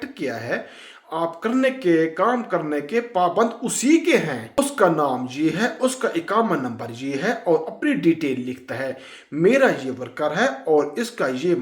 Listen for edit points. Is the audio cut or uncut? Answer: cut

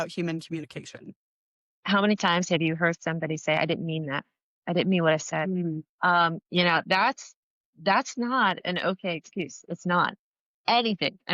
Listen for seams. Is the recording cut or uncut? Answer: cut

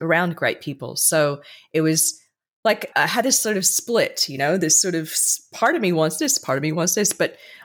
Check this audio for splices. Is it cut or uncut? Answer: uncut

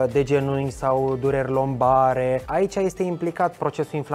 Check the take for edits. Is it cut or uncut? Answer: cut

